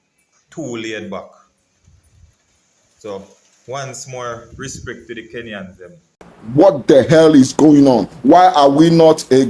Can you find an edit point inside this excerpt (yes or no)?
yes